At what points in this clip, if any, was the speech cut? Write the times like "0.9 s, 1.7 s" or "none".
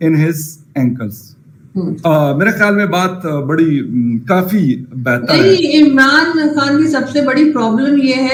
none

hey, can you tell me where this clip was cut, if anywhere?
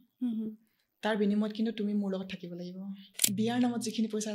3.1 s

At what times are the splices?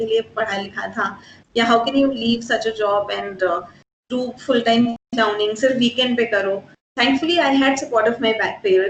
none

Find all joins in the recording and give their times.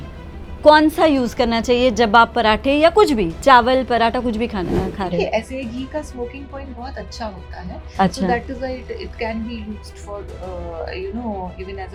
none

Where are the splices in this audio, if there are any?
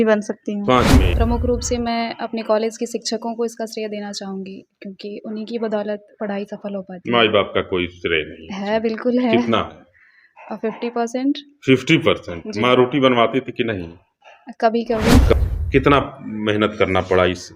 1.1 s, 15.2 s

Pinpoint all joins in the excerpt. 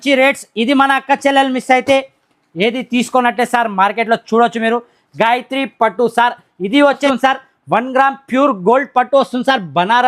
7.0 s

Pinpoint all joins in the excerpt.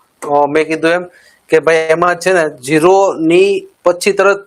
none

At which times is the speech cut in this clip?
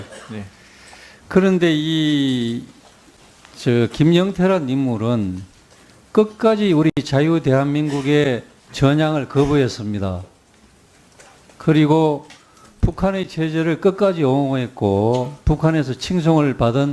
none

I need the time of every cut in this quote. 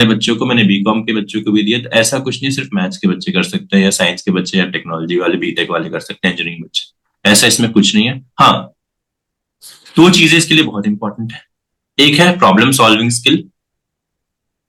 none

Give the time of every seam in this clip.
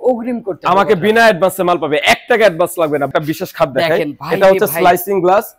3.1 s

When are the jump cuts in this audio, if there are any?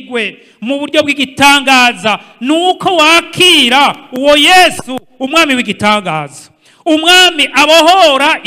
none

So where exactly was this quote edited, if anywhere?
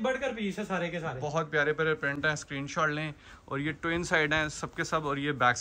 none

